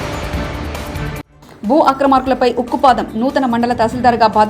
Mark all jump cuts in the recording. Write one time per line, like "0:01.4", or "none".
0:01.2